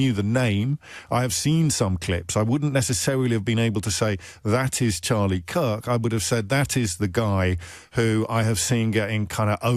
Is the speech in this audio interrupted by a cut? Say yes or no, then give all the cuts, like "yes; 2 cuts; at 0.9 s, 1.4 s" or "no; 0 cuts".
no; 0 cuts